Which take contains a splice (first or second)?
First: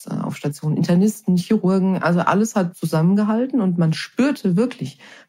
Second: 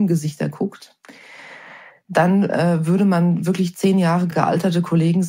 second